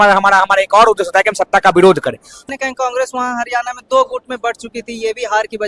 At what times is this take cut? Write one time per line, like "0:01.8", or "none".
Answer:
0:02.4